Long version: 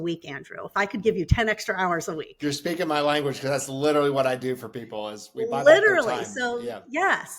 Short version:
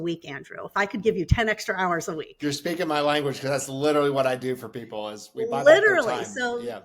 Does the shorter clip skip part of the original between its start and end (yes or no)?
no